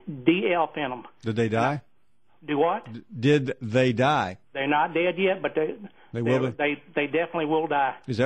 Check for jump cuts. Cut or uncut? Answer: uncut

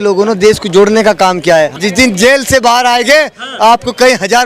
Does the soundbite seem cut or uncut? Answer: cut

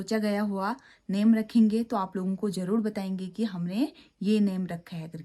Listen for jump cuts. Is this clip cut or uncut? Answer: uncut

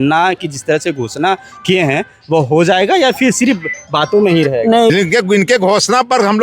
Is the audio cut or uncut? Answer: cut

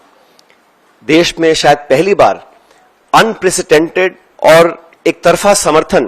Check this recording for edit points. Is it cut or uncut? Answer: cut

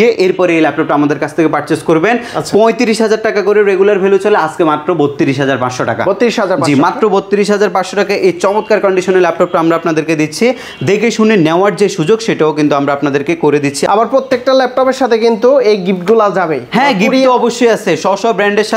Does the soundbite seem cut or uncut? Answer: uncut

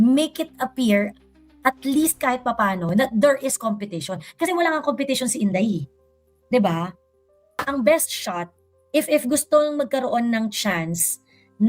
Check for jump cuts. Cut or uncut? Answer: cut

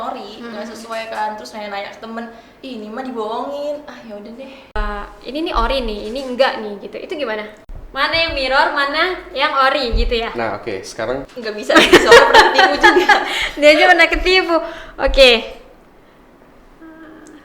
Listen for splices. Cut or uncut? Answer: cut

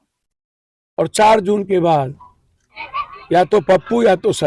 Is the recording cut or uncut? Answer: uncut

